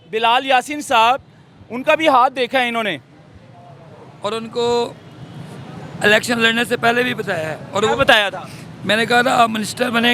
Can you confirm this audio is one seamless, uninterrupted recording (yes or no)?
yes